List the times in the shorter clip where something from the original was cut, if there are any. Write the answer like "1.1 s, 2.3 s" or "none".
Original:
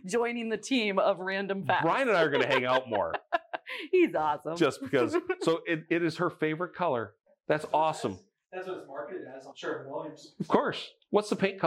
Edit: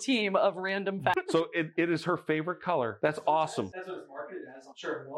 1.1 s, 2.9 s, 3.7 s